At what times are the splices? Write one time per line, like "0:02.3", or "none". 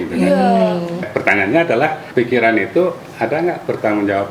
0:01.1
0:02.0

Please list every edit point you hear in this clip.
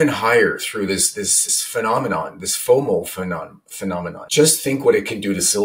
0:01.4
0:04.2

